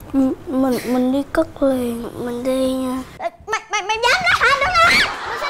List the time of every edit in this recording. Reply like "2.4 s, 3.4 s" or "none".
2.1 s